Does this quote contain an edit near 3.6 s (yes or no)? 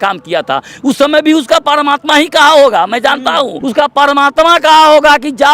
yes